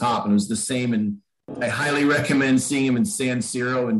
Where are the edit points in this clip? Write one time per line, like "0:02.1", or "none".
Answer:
0:01.5